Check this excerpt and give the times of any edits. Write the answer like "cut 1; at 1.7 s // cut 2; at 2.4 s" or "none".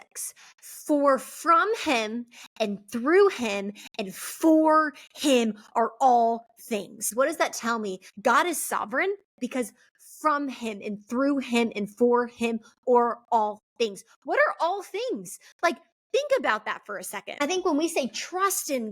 cut 1; at 7.0 s // cut 2; at 8.1 s // cut 3; at 9.3 s // cut 4; at 17.2 s